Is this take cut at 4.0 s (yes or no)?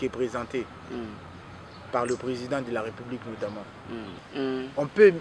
yes